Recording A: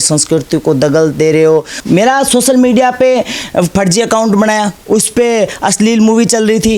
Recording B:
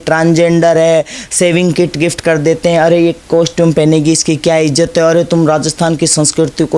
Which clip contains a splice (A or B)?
A